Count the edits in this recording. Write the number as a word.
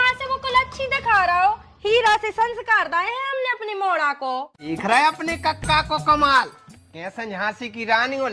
one